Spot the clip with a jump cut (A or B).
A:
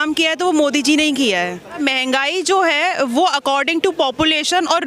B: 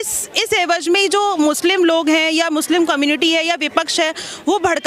A